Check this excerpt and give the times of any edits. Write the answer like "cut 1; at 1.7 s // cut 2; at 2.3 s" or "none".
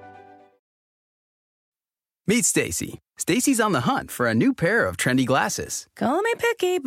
none